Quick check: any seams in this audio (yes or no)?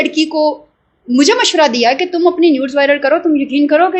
no